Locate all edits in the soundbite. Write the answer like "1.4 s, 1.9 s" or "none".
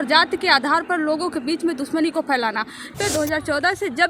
2.9 s